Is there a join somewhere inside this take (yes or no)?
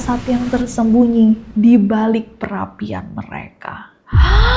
no